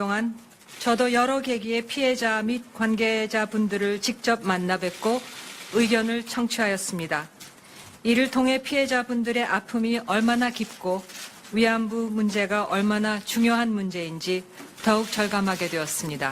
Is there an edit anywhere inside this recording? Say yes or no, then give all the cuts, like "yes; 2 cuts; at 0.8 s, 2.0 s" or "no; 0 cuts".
yes; 1 cut; at 10.3 s